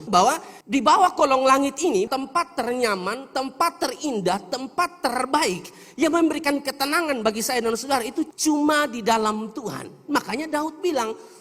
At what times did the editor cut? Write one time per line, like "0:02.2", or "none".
0:02.1